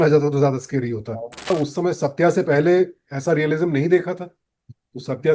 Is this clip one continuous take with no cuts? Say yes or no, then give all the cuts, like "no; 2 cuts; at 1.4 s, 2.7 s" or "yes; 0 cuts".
no; 1 cut; at 1.5 s